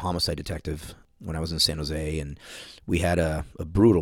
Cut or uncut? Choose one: cut